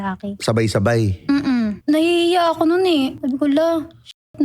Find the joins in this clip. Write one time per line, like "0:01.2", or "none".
0:01.8
0:03.2